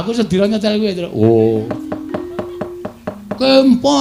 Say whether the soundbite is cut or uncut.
uncut